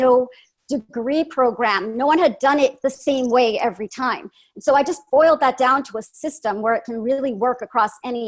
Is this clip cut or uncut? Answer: uncut